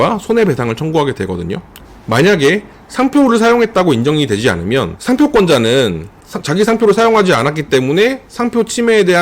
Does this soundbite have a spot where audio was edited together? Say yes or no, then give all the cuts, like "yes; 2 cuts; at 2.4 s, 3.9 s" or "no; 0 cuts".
yes; 1 cut; at 1.7 s